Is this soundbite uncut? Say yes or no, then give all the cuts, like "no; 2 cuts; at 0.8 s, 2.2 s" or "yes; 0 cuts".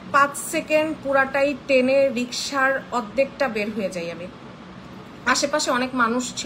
yes; 0 cuts